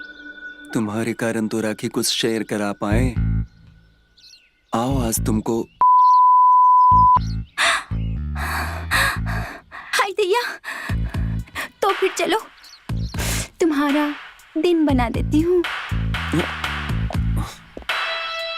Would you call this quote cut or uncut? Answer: uncut